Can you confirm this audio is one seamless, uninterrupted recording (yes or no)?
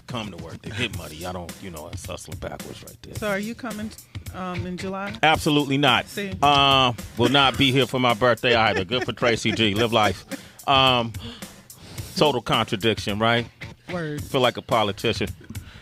yes